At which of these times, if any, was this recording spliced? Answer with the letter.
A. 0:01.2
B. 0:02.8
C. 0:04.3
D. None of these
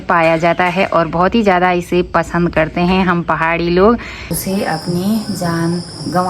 C